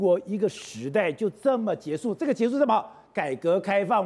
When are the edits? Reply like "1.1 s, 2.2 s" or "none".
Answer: none